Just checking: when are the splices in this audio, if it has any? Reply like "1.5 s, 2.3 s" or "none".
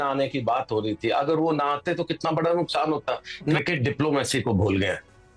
3.6 s